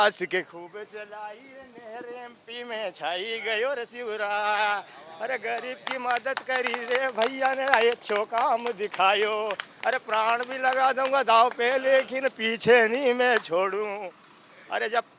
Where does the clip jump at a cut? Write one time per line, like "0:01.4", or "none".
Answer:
none